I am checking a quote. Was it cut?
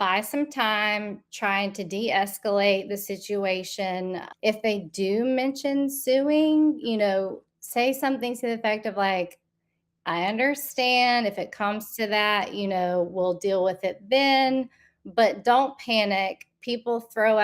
yes; 1 cut; at 4.2 s

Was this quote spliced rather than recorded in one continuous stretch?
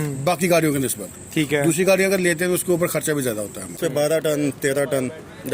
yes; 1 cut; at 3.8 s

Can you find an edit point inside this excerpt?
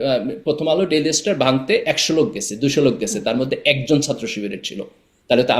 no; 0 cuts

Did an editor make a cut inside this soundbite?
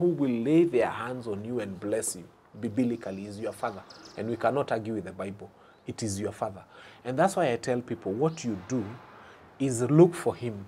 no; 0 cuts

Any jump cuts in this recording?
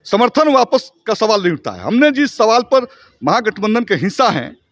no; 0 cuts

